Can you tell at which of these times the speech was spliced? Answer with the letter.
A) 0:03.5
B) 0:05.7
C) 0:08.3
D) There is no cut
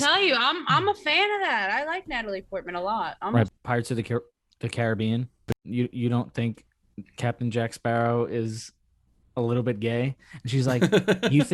A